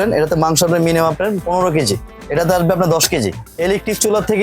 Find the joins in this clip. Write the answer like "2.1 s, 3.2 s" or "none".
2.2 s, 3.4 s